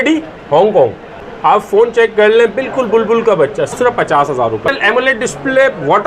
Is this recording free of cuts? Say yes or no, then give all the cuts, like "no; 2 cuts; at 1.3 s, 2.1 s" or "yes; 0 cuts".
no; 3 cuts; at 1.2 s, 3.7 s, 4.7 s